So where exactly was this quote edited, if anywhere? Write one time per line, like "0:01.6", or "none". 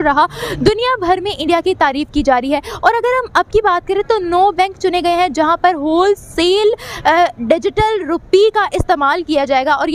none

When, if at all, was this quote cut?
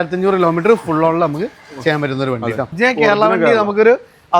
0:02.7

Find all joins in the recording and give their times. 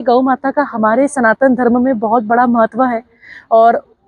none

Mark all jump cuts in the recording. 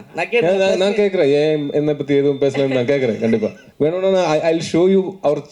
0:03.6

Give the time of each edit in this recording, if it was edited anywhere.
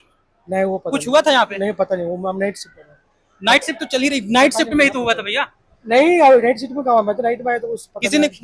none

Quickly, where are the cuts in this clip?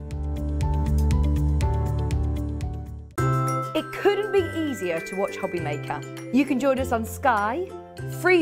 none

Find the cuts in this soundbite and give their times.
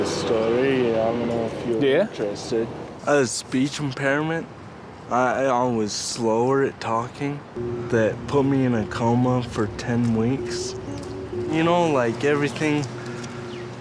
0:02.9
0:07.6

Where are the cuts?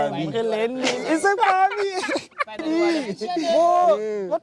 0:02.6

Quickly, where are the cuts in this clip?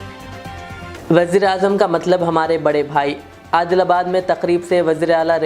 0:00.9

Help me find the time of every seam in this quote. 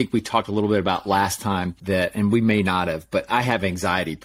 0:01.7

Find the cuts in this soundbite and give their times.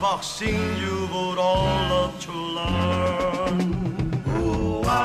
none

